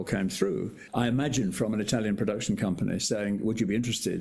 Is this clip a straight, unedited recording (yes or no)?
yes